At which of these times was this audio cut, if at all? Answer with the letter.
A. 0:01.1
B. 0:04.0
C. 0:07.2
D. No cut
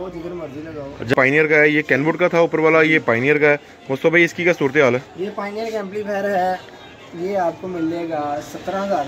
A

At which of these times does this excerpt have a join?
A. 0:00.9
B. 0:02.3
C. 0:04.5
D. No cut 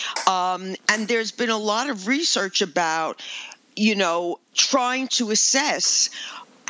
C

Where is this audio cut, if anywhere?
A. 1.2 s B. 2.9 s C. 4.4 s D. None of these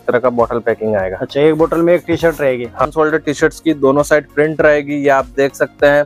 B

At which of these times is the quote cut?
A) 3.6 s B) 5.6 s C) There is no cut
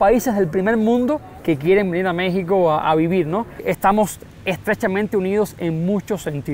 A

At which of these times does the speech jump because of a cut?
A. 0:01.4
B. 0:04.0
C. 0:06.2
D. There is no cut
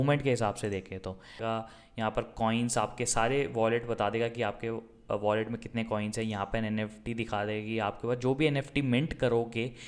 A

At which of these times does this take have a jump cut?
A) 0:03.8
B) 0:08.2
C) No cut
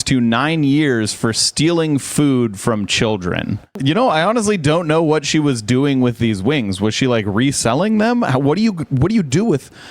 A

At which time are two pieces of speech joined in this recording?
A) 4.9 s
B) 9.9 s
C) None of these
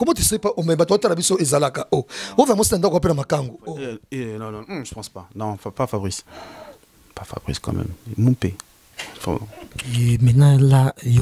B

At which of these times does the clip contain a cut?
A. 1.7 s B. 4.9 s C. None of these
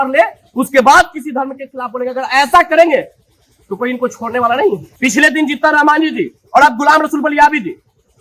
B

